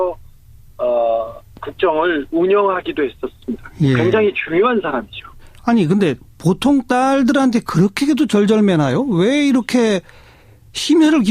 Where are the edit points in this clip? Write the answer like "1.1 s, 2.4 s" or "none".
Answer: 6.7 s

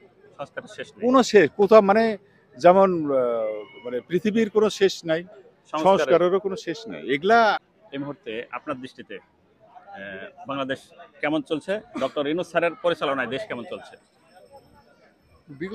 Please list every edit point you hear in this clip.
7.7 s

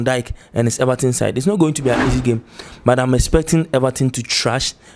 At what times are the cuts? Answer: none

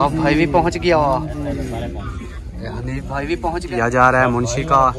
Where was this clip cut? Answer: 3.7 s

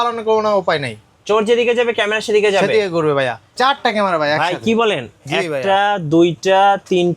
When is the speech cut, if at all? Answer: 3.5 s

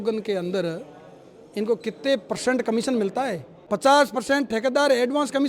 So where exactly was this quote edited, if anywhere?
3.5 s

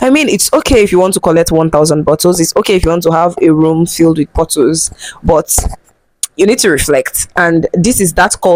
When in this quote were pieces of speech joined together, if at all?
none

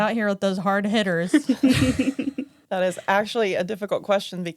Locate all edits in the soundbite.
2.5 s

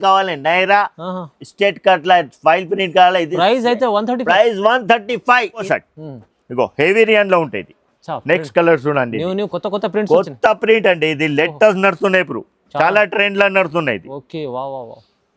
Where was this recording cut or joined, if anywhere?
5.7 s

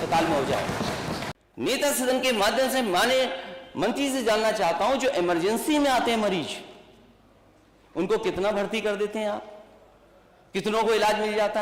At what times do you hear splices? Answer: 1.2 s

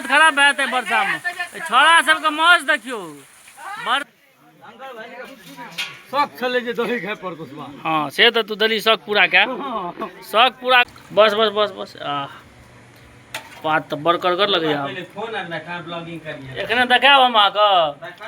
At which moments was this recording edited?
4.1 s, 10.9 s

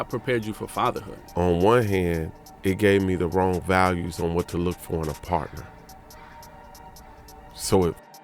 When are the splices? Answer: 1.1 s

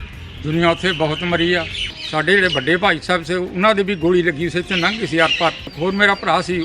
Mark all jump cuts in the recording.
2.0 s

